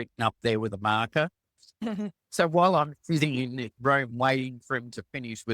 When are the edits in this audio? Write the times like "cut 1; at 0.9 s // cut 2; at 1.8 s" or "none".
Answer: cut 1; at 1.8 s